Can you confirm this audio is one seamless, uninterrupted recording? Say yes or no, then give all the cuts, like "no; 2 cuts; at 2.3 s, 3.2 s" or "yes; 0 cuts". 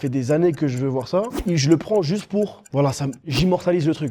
no; 2 cuts; at 1.4 s, 2.9 s